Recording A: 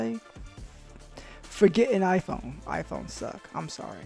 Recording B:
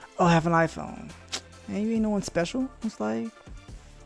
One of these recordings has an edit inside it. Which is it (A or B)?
A